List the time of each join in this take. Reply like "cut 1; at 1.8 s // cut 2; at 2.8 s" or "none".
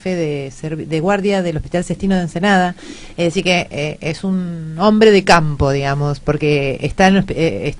cut 1; at 3.4 s